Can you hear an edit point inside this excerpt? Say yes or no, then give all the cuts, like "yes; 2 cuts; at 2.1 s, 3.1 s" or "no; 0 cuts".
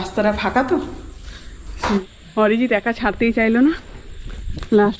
yes; 1 cut; at 2.0 s